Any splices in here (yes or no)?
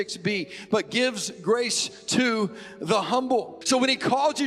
yes